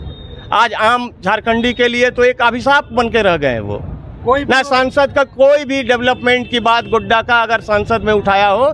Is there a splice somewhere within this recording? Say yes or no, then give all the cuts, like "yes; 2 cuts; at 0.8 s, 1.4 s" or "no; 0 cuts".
no; 0 cuts